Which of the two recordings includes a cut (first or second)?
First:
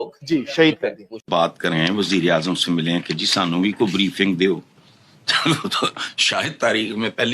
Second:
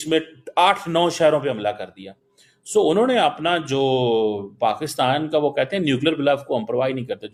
first